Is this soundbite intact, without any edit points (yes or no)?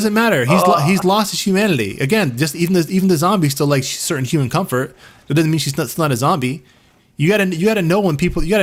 yes